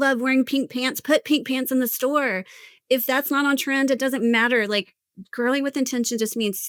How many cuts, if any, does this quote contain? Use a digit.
0